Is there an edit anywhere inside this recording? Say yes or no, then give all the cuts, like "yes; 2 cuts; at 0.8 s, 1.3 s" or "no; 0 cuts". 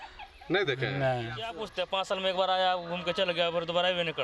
yes; 1 cut; at 1.6 s